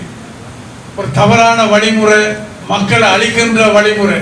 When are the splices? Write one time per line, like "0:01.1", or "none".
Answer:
0:02.5